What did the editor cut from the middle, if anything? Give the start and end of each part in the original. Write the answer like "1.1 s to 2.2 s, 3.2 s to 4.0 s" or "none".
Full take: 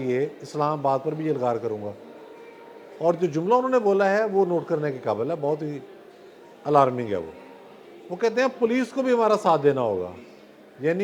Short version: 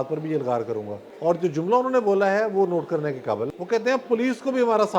2.0 s to 2.8 s, 5.3 s to 8.0 s